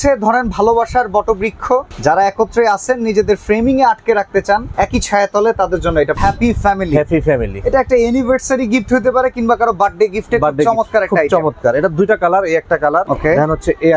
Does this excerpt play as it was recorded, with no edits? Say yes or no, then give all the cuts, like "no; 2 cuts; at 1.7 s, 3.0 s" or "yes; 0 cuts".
no; 4 cuts; at 1.9 s, 4.7 s, 6.2 s, 13.1 s